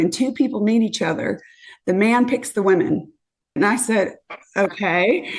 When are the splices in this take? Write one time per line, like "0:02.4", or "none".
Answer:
0:03.6